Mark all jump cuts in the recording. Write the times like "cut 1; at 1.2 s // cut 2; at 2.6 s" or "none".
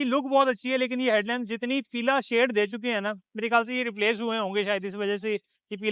none